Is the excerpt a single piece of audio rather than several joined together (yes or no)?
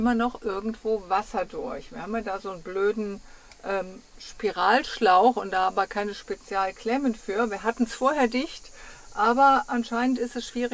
yes